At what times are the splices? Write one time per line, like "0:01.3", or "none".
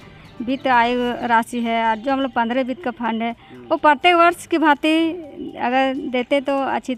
none